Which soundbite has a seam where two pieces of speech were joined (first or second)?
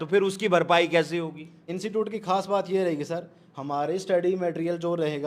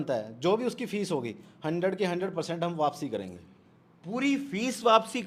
first